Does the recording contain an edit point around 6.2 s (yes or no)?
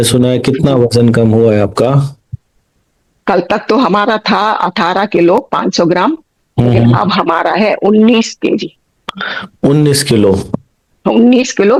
no